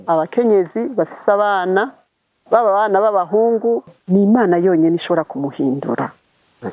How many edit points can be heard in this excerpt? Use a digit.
1